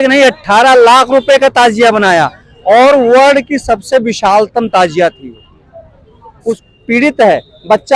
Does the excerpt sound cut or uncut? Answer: cut